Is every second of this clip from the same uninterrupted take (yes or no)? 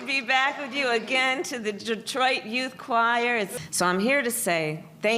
no